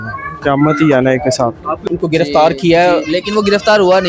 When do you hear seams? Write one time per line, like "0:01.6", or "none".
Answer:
0:01.8